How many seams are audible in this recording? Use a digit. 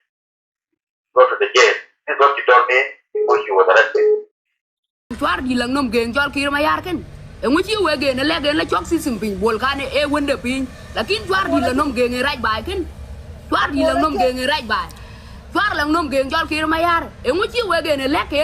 1